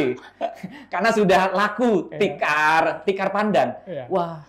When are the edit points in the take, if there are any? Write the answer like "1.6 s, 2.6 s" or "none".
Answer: none